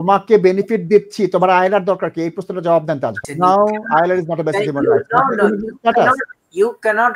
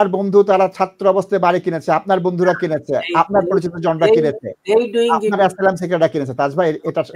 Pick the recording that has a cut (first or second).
first